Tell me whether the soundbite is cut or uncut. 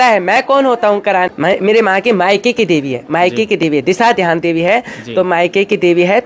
cut